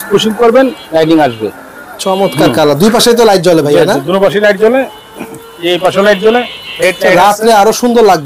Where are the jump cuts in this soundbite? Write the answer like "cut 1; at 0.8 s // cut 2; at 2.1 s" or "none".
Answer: none